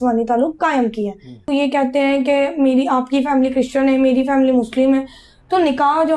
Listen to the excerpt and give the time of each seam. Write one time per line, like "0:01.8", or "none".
0:01.4